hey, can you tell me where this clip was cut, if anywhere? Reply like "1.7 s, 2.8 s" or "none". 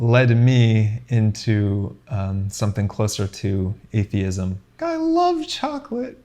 4.8 s